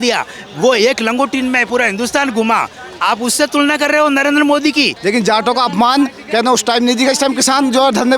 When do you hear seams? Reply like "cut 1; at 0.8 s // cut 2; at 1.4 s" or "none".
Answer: cut 1; at 4.9 s